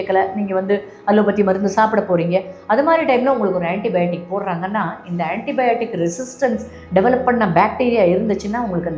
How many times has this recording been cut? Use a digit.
0